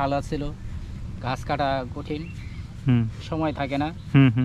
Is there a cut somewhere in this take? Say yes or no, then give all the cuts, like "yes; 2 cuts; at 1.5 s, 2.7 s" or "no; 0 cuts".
no; 0 cuts